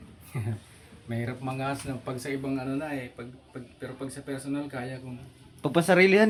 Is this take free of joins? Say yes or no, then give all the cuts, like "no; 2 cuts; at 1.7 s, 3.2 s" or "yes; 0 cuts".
yes; 0 cuts